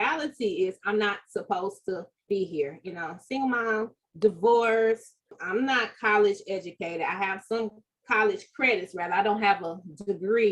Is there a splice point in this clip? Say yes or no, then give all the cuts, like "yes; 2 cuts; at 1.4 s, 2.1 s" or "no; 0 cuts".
yes; 1 cut; at 5.3 s